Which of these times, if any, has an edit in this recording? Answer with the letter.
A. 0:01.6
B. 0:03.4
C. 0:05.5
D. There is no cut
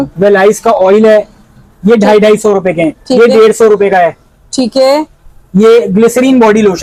D